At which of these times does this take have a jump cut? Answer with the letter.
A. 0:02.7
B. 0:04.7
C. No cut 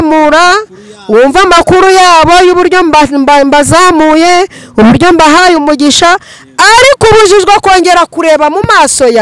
C